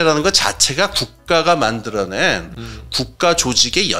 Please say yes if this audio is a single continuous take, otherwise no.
yes